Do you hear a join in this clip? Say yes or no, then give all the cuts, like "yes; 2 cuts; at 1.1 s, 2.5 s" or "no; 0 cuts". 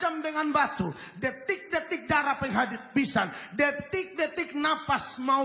no; 0 cuts